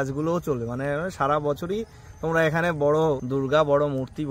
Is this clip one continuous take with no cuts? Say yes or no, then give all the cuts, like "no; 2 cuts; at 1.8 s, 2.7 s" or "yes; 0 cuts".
no; 1 cut; at 3.2 s